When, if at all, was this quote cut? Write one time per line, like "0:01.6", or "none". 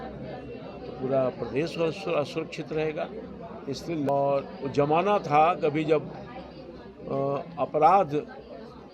0:04.1